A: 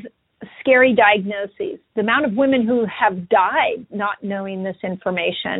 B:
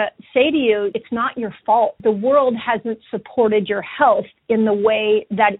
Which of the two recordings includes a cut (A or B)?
B